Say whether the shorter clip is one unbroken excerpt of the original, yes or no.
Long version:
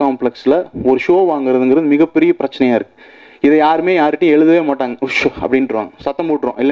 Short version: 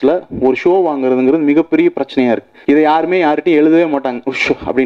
no